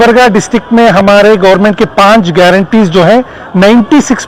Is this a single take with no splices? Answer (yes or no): yes